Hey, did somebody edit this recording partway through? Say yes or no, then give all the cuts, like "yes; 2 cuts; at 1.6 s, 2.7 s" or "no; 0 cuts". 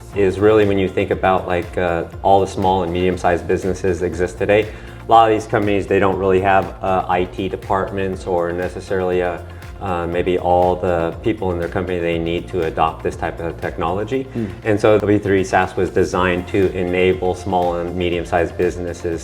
no; 0 cuts